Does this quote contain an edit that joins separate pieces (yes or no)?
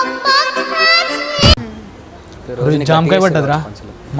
yes